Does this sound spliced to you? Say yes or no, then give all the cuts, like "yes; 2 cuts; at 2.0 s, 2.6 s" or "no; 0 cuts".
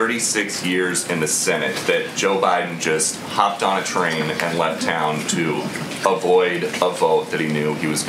no; 0 cuts